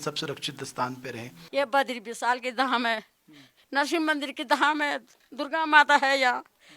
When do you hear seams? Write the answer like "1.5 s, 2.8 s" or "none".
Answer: 1.4 s